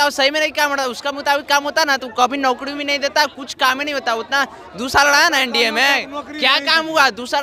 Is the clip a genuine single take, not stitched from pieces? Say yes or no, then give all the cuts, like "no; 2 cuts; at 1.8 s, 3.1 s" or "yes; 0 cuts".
yes; 0 cuts